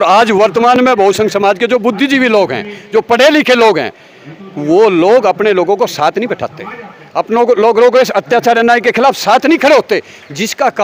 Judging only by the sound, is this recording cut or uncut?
uncut